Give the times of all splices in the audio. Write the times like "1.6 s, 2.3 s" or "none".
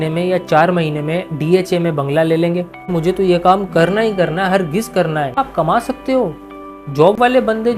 2.9 s, 5.3 s